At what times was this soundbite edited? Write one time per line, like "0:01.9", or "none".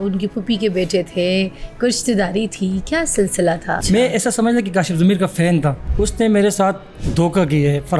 0:03.8
0:05.8
0:06.9